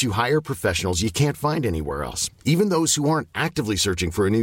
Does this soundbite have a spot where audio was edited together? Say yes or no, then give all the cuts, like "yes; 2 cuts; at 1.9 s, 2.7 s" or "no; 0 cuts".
no; 0 cuts